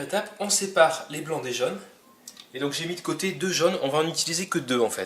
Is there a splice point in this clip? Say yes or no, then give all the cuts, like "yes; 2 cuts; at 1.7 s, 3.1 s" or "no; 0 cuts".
yes; 1 cut; at 3.0 s